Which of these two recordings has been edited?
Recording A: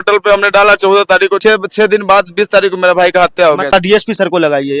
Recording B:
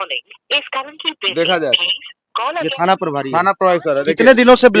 A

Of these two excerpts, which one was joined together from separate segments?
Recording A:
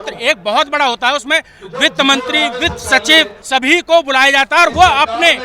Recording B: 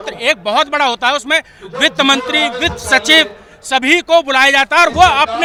A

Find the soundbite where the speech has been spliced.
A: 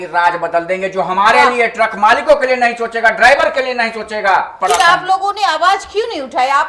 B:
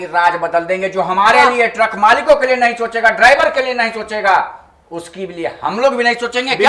A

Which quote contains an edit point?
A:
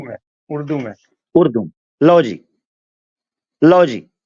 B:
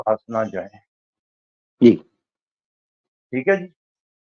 A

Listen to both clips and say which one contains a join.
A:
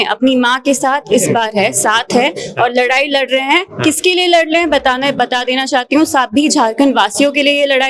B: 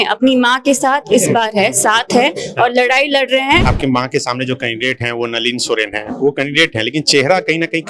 B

